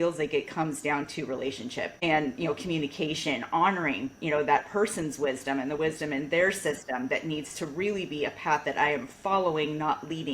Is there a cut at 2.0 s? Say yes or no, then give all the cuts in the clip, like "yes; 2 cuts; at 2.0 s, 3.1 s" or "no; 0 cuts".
yes; 1 cut; at 2.0 s